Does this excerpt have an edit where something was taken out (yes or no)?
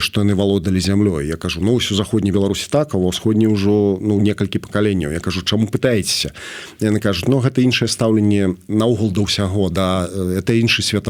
no